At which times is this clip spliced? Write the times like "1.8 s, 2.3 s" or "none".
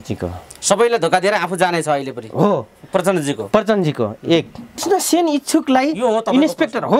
4.8 s